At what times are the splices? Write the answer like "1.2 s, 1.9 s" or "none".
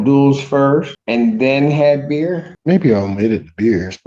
1.0 s, 2.5 s

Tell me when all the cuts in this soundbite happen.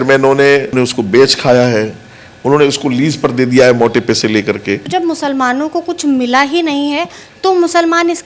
0.7 s, 4.8 s

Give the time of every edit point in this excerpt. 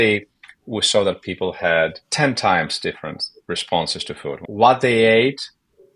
2.0 s, 4.4 s

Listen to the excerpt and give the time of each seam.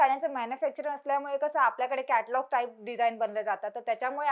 none

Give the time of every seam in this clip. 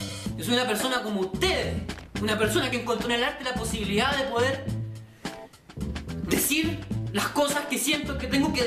4.1 s

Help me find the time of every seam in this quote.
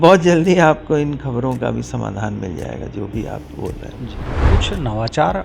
4.4 s

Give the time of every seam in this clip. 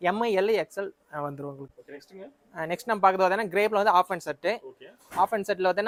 none

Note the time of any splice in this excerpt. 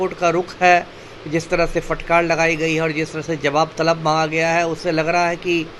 none

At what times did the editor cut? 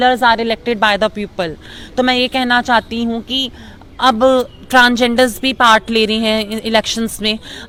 none

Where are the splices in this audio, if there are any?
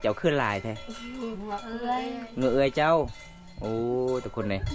none

